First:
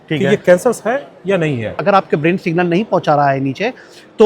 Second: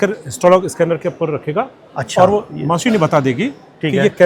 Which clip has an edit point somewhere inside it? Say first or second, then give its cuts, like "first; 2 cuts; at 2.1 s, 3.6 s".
first; 1 cut; at 1.8 s